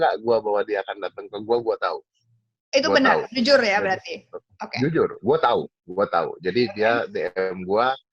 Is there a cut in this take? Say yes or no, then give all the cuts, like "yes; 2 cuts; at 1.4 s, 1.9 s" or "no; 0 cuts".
no; 0 cuts